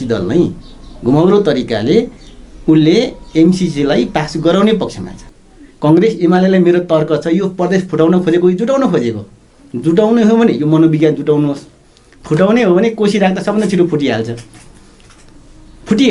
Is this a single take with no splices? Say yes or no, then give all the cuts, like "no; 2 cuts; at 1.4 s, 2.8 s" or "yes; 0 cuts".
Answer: no; 1 cut; at 5.2 s